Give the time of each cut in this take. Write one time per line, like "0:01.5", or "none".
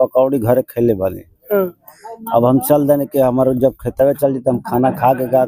none